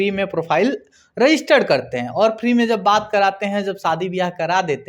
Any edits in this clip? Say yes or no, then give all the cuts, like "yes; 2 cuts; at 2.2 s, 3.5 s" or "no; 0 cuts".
no; 0 cuts